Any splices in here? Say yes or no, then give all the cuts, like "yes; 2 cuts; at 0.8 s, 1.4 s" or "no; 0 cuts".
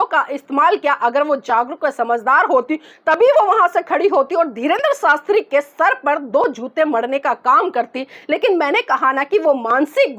no; 0 cuts